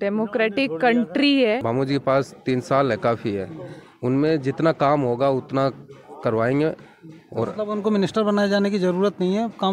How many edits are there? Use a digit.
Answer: 1